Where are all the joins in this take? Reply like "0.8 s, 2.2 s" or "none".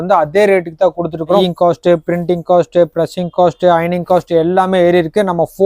1.4 s